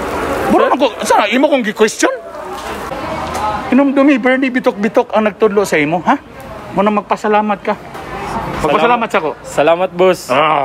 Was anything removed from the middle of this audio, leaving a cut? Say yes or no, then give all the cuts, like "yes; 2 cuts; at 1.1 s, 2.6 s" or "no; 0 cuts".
yes; 1 cut; at 2.8 s